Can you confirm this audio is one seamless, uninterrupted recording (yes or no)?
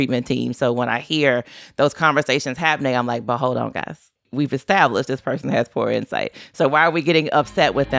no